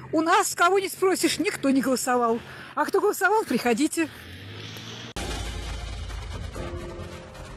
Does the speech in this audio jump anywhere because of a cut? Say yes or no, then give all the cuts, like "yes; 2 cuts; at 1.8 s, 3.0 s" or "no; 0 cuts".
no; 0 cuts